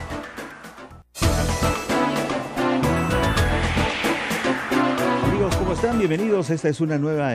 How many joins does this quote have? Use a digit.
2